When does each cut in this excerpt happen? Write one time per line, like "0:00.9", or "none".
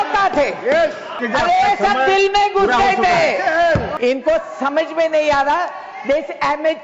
0:01.2
0:03.9